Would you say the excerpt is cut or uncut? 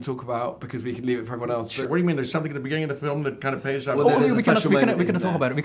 cut